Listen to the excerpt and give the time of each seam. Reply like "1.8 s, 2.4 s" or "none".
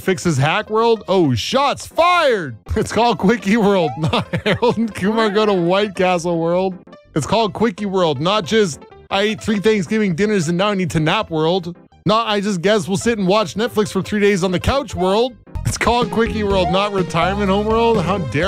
2.6 s, 6.9 s, 11.8 s, 15.6 s